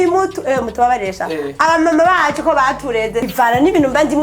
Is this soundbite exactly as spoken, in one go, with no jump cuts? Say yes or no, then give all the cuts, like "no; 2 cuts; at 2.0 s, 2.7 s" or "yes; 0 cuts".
no; 1 cut; at 3.3 s